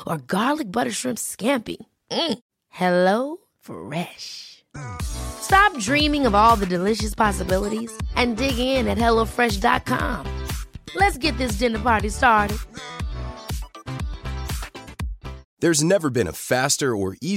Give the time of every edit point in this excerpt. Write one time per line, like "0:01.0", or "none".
0:15.5